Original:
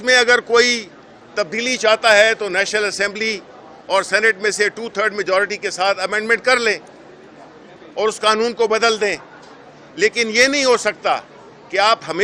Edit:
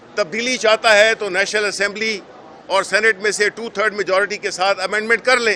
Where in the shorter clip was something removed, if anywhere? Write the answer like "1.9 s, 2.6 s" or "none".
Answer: none